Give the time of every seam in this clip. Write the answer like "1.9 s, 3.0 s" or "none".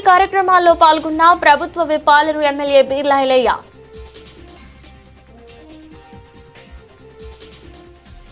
none